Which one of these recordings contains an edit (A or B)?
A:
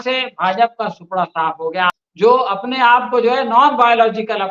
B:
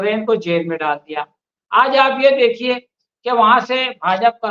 A